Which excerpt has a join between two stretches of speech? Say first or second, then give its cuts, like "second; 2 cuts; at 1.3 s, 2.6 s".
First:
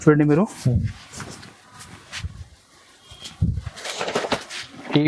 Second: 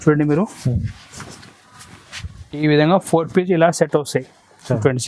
second; 1 cut; at 2.6 s